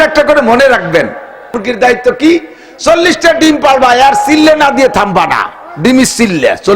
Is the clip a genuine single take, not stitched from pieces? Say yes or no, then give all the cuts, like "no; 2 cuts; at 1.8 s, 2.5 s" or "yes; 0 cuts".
no; 1 cut; at 1.6 s